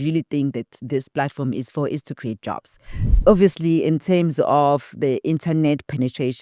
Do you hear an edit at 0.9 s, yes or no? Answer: no